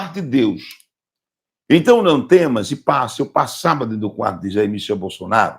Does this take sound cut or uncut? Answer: cut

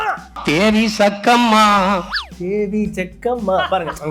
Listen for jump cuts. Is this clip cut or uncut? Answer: cut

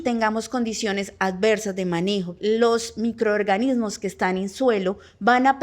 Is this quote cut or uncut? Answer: cut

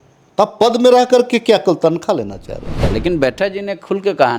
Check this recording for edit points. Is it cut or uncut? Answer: cut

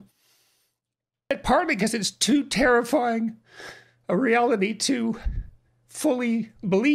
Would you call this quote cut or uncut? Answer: cut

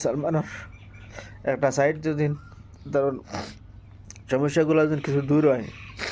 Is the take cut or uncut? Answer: cut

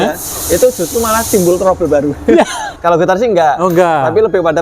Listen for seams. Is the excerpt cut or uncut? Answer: cut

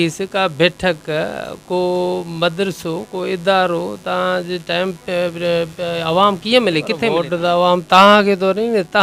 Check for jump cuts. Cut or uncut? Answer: cut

